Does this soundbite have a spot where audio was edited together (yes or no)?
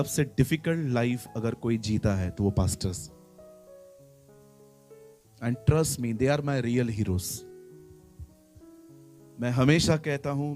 yes